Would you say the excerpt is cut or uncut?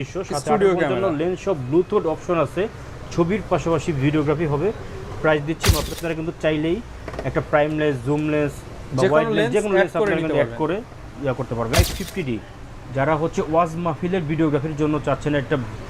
cut